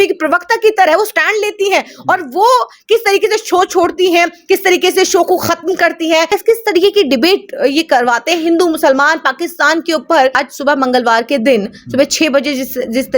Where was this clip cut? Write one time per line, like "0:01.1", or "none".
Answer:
0:06.3
0:10.3